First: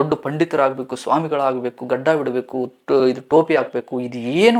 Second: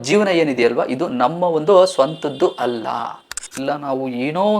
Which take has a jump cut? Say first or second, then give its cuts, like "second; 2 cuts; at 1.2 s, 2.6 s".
second; 1 cut; at 3.6 s